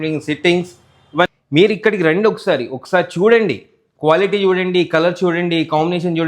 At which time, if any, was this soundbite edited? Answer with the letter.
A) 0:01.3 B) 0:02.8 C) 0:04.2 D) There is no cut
A